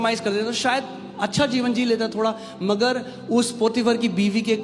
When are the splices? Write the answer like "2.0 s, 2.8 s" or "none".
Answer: none